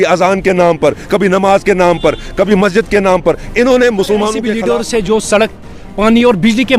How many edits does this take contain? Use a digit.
1